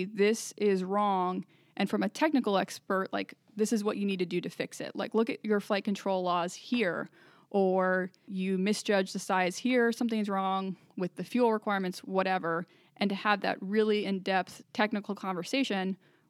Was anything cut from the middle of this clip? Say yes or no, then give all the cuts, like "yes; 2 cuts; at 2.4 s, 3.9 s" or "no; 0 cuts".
yes; 2 cuts; at 8.3 s, 14.6 s